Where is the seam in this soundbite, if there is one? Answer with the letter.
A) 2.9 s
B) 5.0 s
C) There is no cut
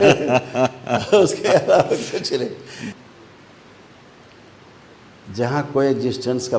A